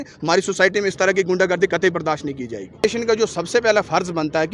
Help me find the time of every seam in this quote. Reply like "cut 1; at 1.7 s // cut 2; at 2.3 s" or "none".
cut 1; at 2.8 s

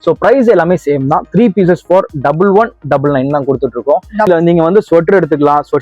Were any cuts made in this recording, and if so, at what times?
cut 1; at 4.3 s

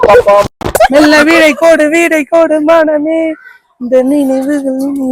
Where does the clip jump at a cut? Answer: none

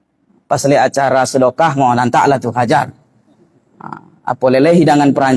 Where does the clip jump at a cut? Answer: none

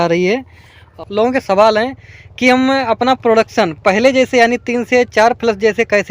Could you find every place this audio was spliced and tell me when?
cut 1; at 0.9 s

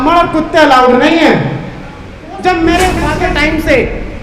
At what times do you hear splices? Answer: cut 1; at 3.1 s

